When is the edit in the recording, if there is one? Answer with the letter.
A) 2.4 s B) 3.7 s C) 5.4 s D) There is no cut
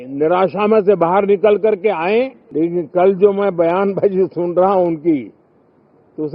A